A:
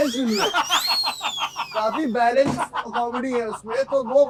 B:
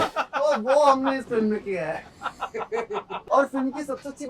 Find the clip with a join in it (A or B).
B